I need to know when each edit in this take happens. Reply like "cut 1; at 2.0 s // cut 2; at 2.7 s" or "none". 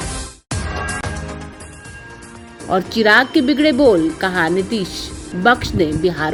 none